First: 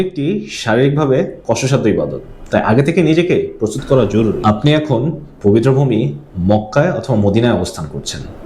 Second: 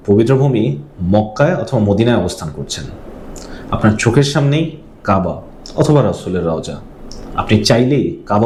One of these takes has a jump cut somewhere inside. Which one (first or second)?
first